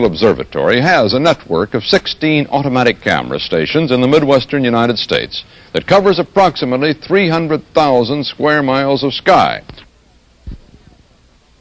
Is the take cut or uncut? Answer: cut